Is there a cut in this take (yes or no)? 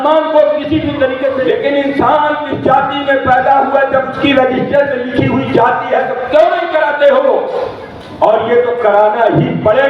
yes